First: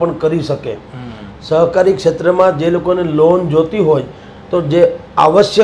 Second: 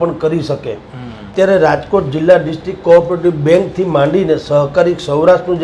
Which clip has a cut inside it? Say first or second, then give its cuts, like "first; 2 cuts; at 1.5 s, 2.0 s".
second; 1 cut; at 1.3 s